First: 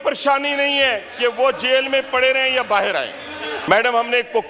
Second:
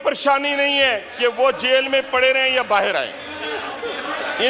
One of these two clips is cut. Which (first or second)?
first